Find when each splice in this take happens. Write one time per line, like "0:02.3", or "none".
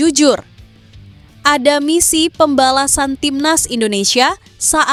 none